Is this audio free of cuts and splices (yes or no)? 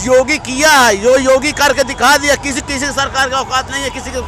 yes